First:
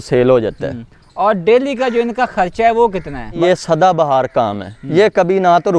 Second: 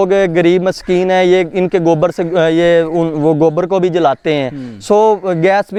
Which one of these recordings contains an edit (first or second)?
first